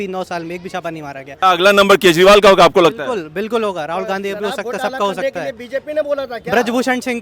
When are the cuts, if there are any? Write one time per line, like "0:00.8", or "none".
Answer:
0:01.4